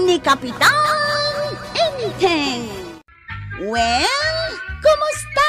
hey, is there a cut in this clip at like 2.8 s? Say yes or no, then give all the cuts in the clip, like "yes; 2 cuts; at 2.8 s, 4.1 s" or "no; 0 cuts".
yes; 1 cut; at 2.8 s